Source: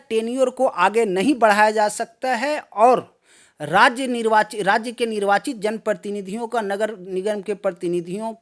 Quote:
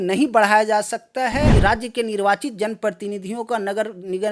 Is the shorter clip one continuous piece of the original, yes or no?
no